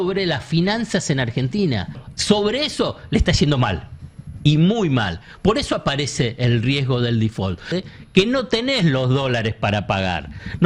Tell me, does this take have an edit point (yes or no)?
yes